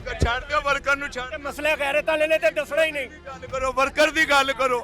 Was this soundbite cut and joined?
no; 0 cuts

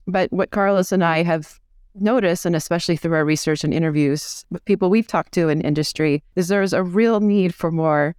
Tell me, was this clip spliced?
yes; 2 cuts; at 4.4 s, 6.3 s

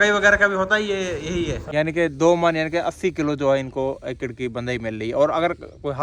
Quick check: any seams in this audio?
yes; 1 cut; at 1.6 s

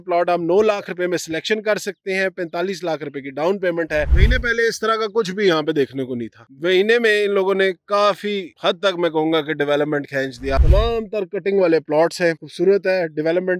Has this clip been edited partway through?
yes; 2 cuts; at 4.1 s, 10.6 s

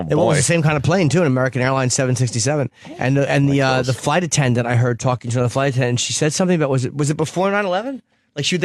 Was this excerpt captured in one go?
yes; 0 cuts

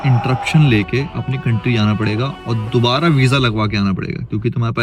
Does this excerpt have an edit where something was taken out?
no; 0 cuts

